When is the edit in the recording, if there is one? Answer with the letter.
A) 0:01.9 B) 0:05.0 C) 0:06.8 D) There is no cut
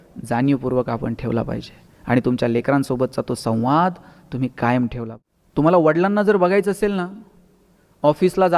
B